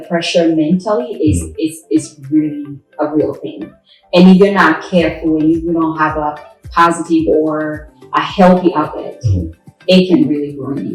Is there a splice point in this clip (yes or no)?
no